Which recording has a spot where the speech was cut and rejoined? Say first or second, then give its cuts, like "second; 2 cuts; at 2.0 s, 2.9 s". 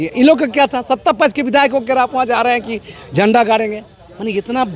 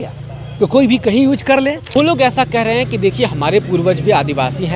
second; 1 cut; at 1.8 s